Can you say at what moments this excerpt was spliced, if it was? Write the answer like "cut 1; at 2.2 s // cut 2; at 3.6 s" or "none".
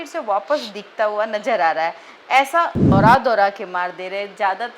cut 1; at 2.9 s

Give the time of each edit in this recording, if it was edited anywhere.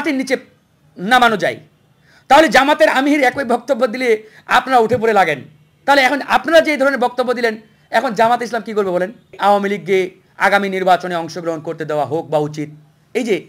cut 1; at 9.3 s

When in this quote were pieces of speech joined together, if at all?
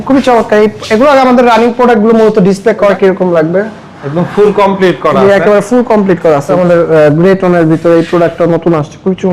cut 1; at 2.9 s // cut 2; at 6.5 s

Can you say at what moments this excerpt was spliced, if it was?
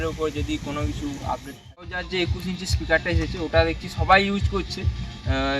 cut 1; at 2.0 s

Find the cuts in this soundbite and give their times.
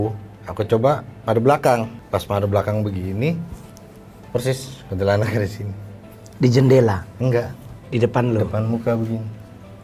none

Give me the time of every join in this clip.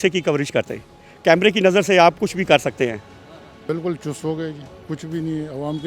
cut 1; at 3.1 s

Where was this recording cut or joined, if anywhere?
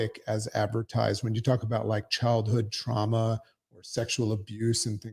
none

